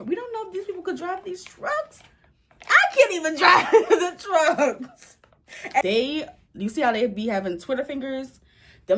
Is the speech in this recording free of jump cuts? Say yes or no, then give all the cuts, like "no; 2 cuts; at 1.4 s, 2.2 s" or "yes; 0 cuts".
no; 1 cut; at 5.8 s